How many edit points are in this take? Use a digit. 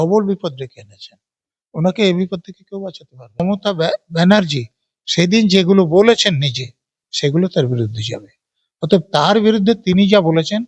1